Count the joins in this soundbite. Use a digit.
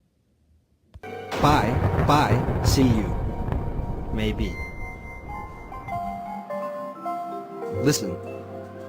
1